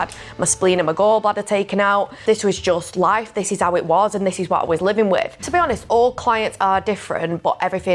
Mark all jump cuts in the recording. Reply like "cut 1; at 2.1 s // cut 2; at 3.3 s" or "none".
cut 1; at 2.1 s // cut 2; at 5.4 s

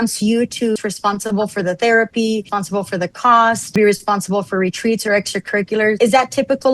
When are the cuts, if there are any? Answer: cut 1; at 0.8 s // cut 2; at 2.6 s // cut 3; at 3.8 s // cut 4; at 6.0 s

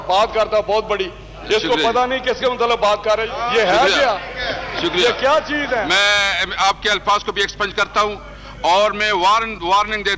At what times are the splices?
cut 1; at 3.3 s // cut 2; at 5.9 s

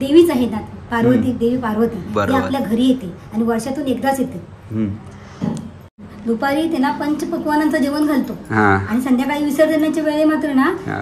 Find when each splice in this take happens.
none

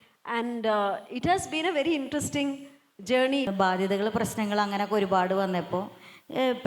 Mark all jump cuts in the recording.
cut 1; at 3.5 s

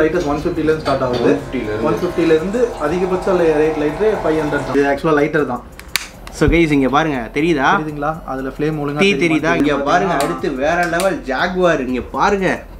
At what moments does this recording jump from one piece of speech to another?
cut 1; at 4.7 s // cut 2; at 9.6 s

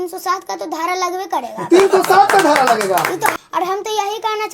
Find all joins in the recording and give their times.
cut 1; at 3.4 s

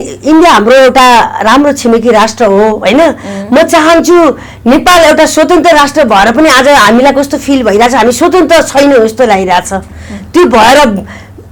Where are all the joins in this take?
none

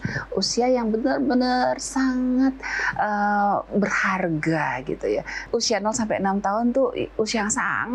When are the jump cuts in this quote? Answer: cut 1; at 5.4 s

